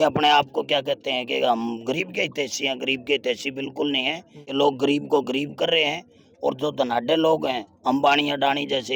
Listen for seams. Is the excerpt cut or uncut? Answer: uncut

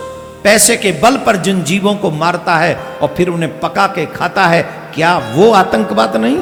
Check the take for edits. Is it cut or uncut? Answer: uncut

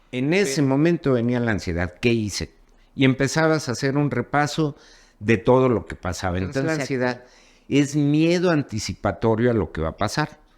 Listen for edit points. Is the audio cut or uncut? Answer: cut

